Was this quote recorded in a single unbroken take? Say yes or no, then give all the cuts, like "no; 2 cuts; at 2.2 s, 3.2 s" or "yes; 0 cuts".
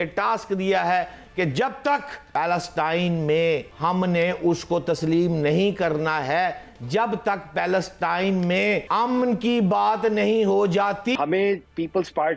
no; 4 cuts; at 2.2 s, 3.7 s, 8.9 s, 11.2 s